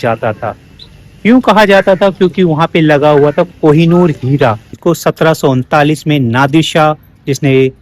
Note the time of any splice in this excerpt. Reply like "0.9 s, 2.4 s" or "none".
4.5 s